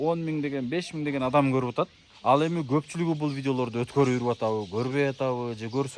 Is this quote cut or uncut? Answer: cut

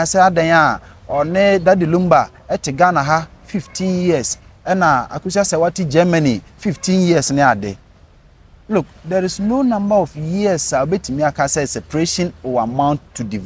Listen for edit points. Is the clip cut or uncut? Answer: uncut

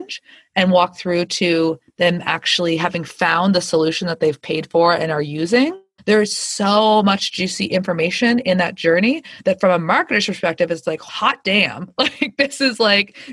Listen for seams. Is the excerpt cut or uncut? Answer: cut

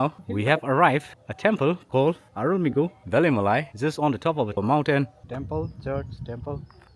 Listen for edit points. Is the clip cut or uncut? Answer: cut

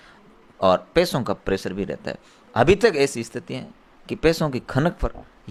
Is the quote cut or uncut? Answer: uncut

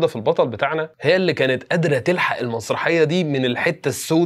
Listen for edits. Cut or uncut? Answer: uncut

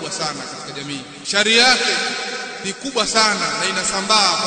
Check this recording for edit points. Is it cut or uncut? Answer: cut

